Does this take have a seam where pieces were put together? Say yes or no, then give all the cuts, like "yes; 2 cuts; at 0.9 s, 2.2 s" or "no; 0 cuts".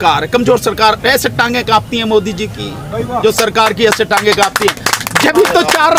no; 0 cuts